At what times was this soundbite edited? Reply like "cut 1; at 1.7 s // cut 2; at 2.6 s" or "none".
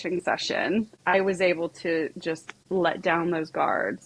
cut 1; at 0.9 s // cut 2; at 2.5 s

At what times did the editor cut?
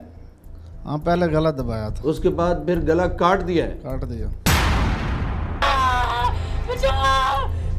cut 1; at 5.6 s

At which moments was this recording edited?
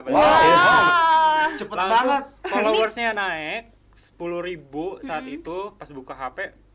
none

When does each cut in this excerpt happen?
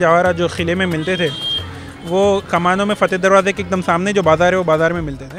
none

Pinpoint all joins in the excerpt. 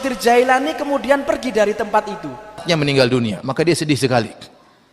cut 1; at 2.6 s

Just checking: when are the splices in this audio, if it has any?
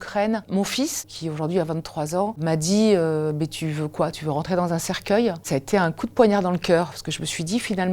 cut 1; at 1.0 s // cut 2; at 2.4 s // cut 3; at 5.4 s

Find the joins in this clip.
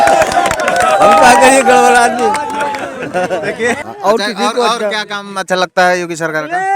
cut 1; at 3.8 s

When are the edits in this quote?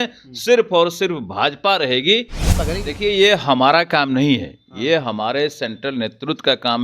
cut 1; at 2.4 s

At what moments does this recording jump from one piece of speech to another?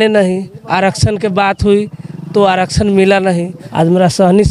cut 1; at 3.6 s

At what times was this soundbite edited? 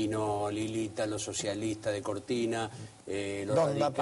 cut 1; at 1.8 s

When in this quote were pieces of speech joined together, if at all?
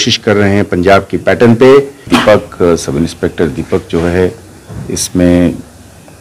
cut 1; at 2.0 s

